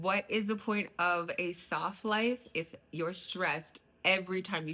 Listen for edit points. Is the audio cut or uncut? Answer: uncut